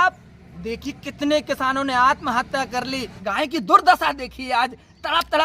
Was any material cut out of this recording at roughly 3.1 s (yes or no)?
yes